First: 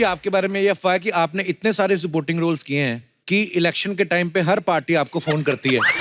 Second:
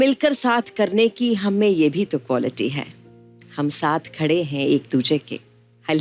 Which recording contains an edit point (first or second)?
first